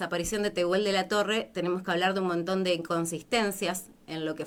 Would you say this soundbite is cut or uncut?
uncut